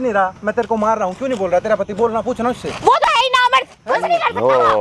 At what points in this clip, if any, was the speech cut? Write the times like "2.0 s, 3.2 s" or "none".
none